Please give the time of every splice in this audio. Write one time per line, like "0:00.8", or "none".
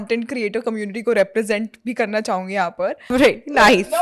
0:03.1